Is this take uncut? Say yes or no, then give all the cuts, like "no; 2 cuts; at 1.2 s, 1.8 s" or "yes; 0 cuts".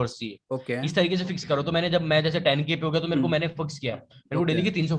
yes; 0 cuts